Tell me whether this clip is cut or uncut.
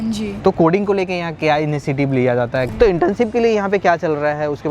cut